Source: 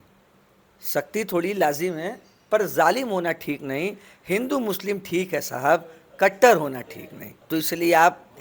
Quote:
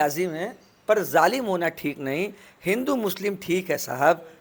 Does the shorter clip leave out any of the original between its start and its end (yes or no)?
no